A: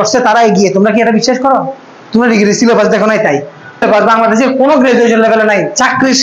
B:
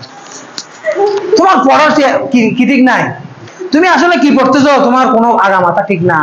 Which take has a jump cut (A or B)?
A